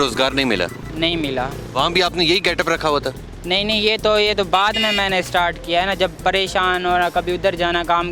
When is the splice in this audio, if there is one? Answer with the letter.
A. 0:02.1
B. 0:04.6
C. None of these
C